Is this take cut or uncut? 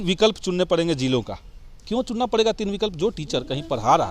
uncut